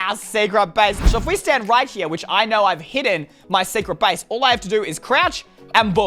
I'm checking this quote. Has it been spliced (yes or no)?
yes